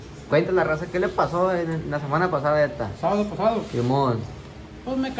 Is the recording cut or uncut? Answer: uncut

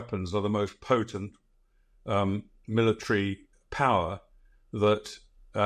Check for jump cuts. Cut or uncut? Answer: uncut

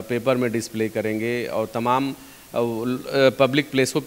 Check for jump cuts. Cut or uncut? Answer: uncut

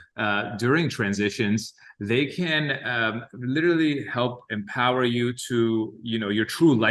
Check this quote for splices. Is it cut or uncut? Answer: uncut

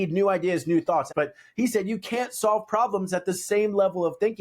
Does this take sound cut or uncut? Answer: cut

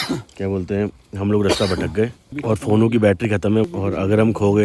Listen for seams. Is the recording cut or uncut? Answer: cut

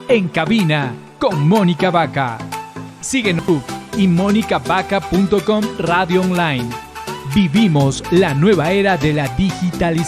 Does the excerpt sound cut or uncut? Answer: cut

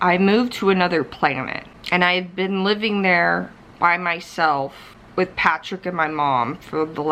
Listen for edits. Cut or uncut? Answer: uncut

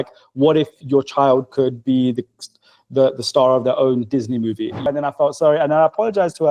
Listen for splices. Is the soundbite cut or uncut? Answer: cut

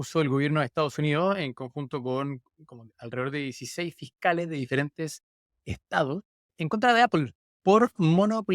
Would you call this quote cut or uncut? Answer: cut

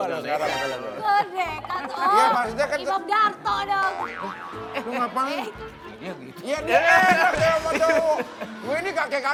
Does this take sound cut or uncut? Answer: uncut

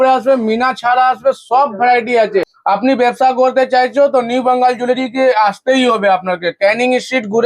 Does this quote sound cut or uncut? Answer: cut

